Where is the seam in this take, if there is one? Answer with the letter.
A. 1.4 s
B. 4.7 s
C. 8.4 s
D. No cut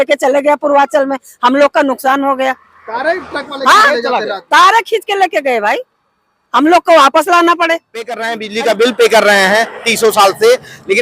C